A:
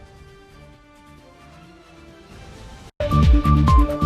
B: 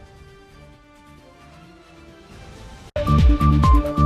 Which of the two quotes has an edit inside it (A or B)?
A